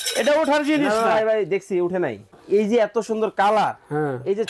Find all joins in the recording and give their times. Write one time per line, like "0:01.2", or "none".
0:02.3